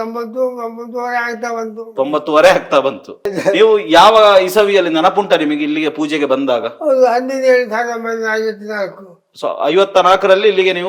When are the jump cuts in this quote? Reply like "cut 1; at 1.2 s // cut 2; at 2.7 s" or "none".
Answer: cut 1; at 3.3 s